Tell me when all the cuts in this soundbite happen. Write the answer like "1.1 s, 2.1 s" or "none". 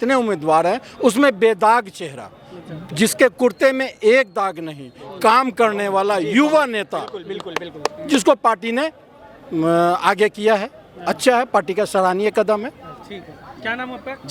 none